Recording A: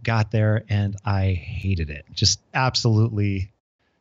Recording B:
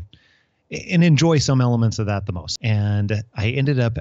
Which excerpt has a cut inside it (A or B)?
B